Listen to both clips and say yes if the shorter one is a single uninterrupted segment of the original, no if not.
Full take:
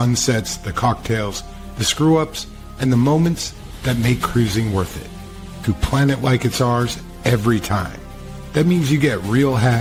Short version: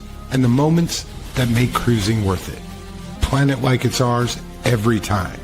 no